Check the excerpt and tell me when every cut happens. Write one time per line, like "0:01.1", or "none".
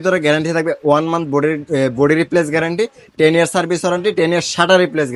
none